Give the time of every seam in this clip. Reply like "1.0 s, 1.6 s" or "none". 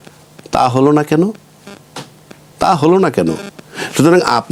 none